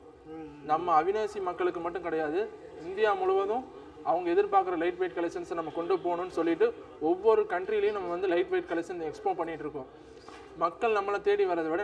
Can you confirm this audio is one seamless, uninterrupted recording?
yes; 0 cuts

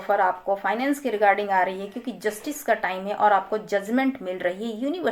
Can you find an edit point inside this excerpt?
no; 0 cuts

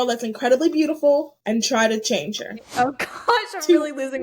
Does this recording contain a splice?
yes; 2 cuts; at 1.3 s, 2.6 s

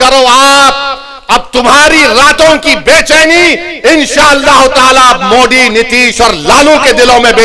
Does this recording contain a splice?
no; 0 cuts

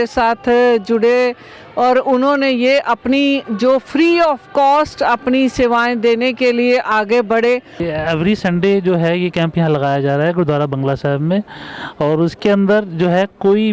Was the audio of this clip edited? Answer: yes; 1 cut; at 7.8 s

